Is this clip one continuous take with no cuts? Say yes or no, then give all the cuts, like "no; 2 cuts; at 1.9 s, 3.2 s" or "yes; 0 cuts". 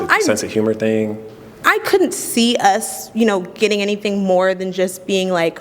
yes; 0 cuts